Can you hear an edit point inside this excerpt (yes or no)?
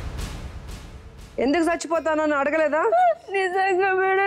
yes